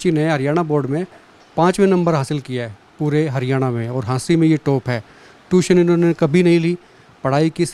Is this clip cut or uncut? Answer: uncut